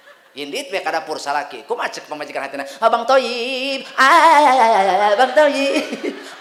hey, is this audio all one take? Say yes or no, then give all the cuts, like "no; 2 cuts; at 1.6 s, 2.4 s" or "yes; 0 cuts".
yes; 0 cuts